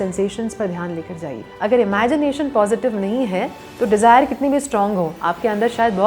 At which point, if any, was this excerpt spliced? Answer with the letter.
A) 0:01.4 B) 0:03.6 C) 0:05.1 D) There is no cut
A